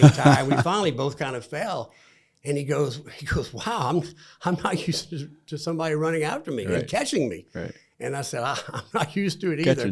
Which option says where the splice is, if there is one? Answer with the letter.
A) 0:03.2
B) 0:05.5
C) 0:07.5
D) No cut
D